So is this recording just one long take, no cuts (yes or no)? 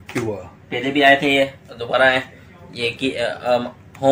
yes